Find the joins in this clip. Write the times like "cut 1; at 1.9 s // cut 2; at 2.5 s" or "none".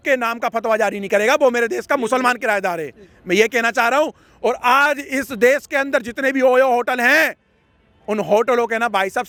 none